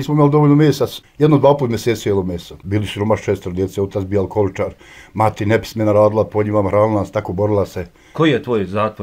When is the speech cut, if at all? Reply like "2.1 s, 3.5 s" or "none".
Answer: 1.0 s, 2.6 s, 8.0 s